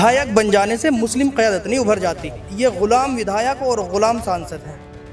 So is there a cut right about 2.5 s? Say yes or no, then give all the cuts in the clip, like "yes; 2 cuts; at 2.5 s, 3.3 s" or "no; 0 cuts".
yes; 1 cut; at 2.5 s